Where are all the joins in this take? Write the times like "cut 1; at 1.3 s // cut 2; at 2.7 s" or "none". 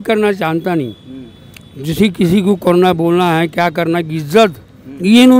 none